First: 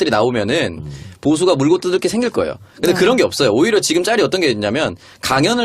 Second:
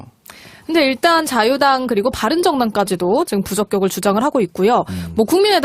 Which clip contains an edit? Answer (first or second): first